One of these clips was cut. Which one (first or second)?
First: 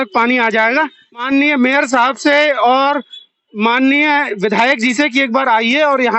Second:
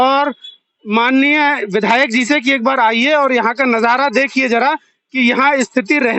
first